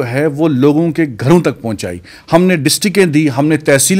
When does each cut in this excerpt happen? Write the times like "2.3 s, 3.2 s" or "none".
none